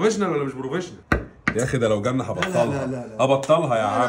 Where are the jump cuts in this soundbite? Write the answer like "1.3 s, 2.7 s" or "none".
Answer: 1.0 s